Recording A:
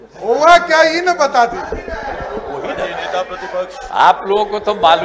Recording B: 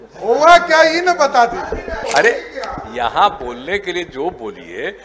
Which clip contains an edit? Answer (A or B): B